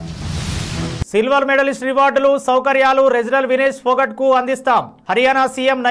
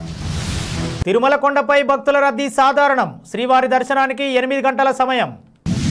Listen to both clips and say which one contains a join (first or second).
first